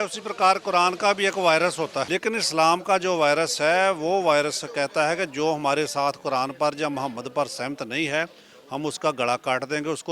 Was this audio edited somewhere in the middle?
yes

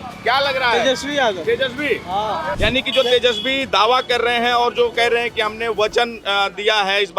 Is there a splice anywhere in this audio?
yes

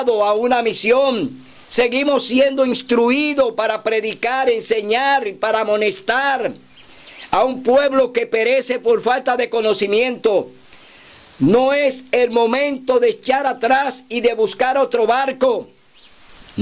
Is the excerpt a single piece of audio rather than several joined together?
yes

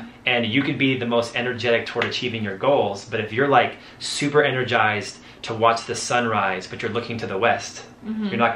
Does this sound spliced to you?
no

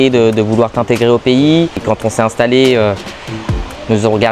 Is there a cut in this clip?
yes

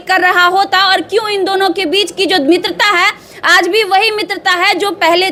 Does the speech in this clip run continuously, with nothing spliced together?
yes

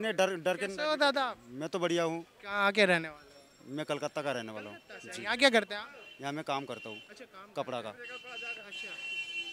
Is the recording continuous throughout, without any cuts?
yes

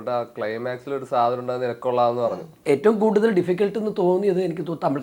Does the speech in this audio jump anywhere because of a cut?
yes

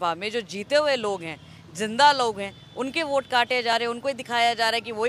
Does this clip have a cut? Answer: no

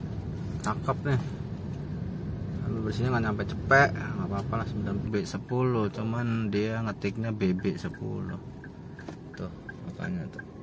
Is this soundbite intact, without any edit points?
no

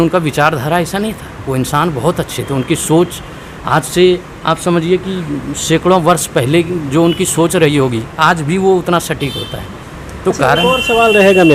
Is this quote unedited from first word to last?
yes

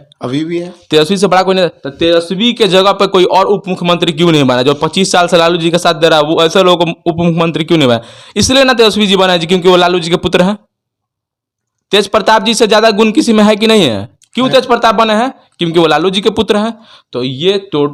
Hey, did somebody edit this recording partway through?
no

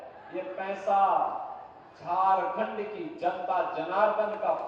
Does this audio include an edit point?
no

